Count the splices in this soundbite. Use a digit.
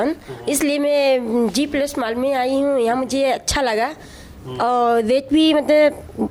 0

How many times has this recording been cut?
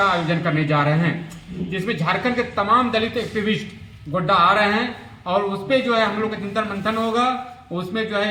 0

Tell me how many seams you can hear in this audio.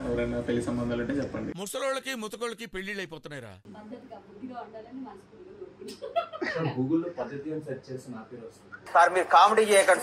1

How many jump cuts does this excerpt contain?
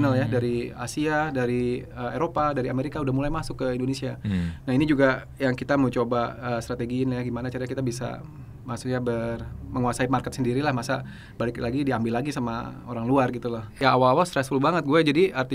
1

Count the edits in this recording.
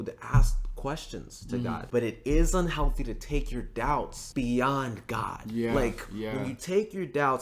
2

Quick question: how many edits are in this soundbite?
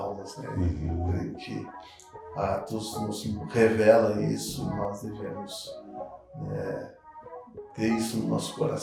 0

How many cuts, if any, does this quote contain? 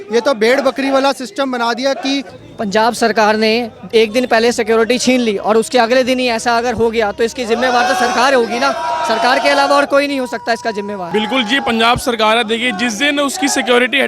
2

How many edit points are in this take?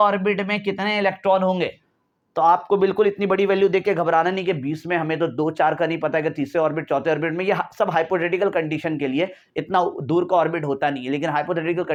0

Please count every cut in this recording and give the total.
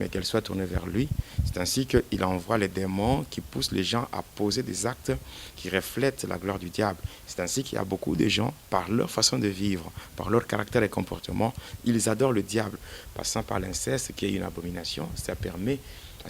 1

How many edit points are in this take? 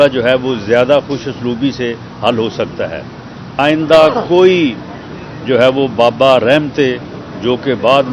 1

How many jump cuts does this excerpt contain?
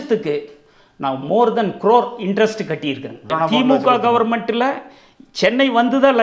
1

